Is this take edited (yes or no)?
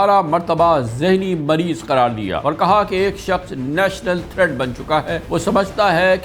yes